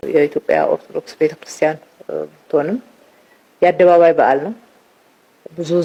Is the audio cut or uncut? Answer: uncut